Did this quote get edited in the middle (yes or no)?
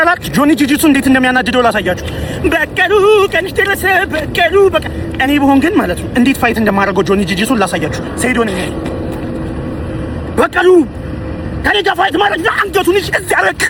no